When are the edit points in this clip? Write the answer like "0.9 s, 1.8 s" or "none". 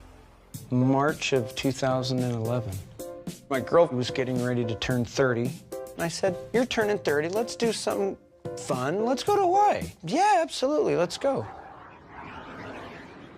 2.8 s